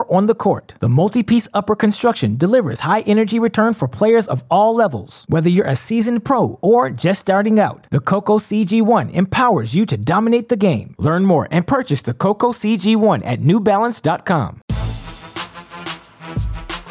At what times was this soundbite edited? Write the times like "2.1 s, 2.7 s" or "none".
14.7 s